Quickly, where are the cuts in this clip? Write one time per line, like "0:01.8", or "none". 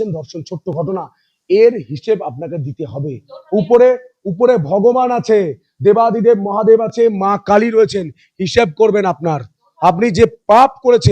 none